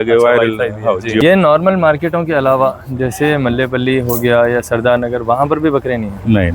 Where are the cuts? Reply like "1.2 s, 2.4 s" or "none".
1.2 s

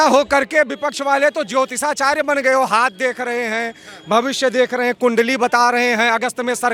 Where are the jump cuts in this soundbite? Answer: none

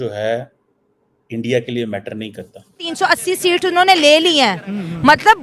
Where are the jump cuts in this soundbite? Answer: 2.8 s

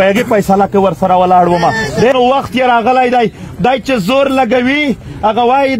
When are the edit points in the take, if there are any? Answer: 2.1 s

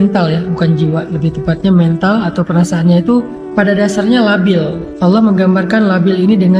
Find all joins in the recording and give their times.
3.4 s, 4.8 s

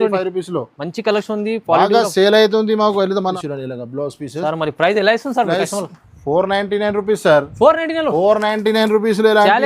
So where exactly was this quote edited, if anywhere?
3.3 s

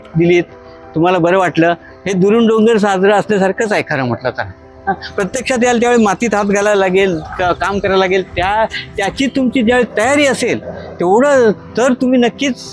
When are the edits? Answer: none

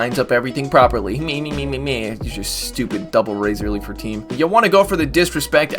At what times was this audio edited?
4.2 s

